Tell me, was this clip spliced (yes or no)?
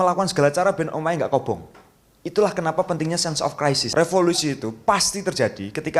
yes